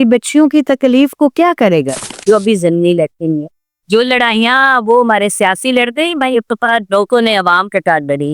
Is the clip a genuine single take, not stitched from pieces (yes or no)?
no